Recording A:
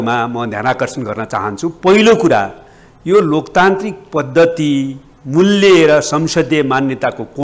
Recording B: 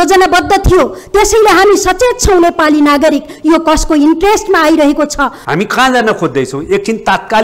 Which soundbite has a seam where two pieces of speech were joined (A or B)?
B